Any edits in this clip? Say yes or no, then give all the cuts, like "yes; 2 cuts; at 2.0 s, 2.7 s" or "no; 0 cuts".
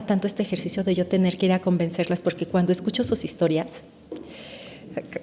no; 0 cuts